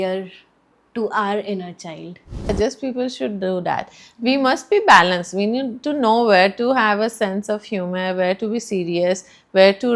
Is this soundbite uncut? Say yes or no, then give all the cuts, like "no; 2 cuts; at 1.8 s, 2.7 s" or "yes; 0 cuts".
no; 1 cut; at 2.5 s